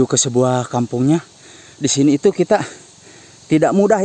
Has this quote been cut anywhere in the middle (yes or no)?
no